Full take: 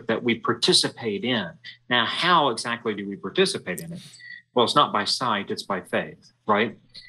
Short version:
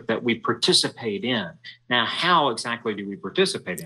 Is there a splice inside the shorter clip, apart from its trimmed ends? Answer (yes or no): no